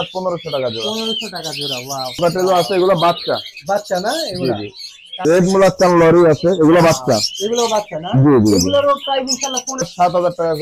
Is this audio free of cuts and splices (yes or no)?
no